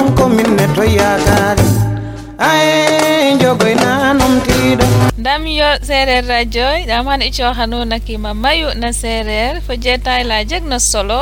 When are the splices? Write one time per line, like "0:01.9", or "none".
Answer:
0:05.1